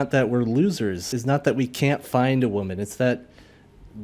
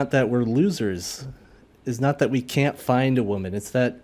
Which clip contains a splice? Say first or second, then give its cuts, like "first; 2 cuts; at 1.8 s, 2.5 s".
first; 1 cut; at 1.1 s